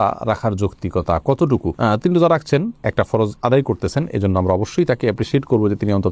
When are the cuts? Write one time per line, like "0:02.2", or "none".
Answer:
none